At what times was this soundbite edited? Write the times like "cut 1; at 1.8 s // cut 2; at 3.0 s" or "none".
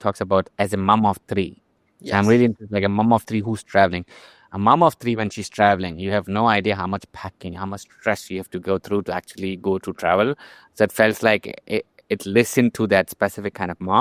none